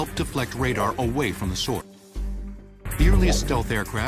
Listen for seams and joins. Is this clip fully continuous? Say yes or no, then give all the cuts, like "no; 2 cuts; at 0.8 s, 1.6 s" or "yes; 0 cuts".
yes; 0 cuts